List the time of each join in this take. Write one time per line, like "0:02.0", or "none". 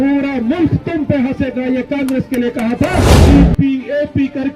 0:03.2